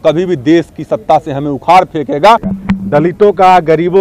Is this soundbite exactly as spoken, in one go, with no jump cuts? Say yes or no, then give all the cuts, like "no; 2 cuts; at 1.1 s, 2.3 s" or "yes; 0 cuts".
no; 1 cut; at 2.5 s